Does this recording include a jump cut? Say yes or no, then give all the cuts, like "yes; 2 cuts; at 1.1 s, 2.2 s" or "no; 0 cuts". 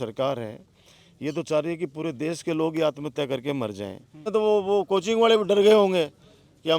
yes; 1 cut; at 4.3 s